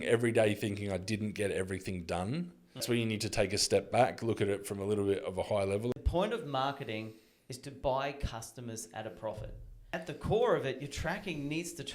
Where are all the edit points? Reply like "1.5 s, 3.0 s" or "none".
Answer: 2.8 s, 5.9 s, 9.9 s